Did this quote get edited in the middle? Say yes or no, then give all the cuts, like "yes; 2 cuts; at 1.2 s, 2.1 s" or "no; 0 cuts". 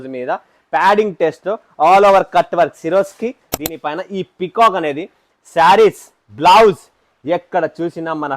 yes; 1 cut; at 3.5 s